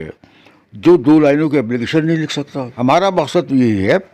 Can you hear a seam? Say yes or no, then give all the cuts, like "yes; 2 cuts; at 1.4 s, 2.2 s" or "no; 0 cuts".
yes; 1 cut; at 2.6 s